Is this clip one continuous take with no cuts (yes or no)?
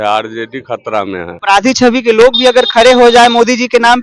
no